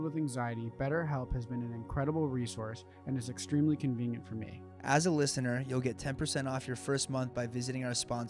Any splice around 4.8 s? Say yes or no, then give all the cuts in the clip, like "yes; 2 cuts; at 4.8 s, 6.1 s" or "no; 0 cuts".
no; 0 cuts